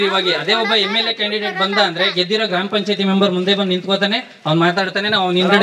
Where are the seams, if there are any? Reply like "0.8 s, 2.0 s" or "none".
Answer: none